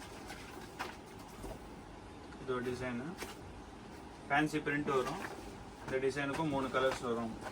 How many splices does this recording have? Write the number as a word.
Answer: zero